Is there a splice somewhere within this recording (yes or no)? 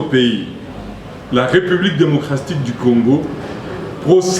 no